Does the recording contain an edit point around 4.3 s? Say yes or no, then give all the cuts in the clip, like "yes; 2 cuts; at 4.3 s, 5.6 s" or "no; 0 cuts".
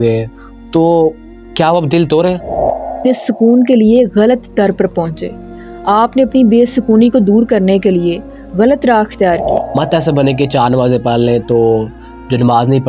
no; 2 cuts; at 3.1 s, 9.8 s